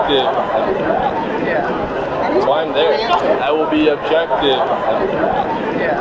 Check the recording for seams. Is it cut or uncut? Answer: uncut